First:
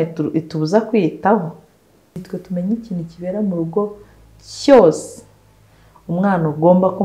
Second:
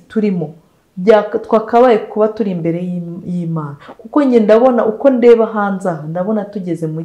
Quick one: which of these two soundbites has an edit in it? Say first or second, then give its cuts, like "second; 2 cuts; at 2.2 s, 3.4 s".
first; 1 cut; at 2.2 s